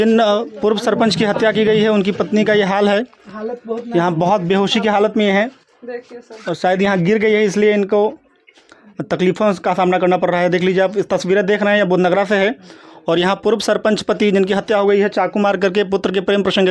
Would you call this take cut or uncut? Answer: uncut